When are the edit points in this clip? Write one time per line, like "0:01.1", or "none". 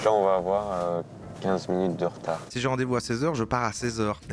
0:02.5